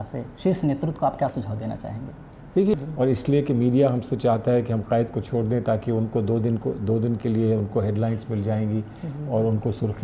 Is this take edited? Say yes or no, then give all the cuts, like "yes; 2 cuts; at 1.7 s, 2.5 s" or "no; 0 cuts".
yes; 1 cut; at 2.7 s